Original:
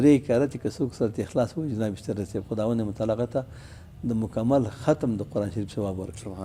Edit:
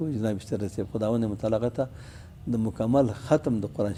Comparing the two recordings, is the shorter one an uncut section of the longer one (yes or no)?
yes